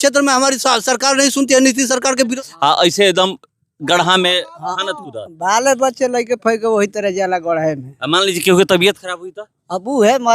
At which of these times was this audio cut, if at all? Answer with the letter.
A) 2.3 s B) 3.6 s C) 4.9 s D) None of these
A